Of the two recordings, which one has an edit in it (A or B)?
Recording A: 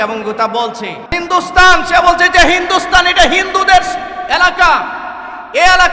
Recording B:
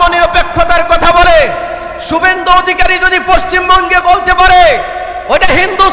A